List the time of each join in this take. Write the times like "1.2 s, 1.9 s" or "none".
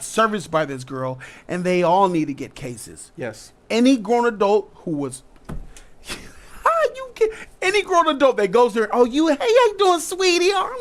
none